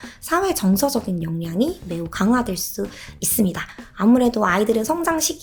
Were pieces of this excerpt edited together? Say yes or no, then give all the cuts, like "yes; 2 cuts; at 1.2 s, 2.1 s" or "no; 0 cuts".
no; 0 cuts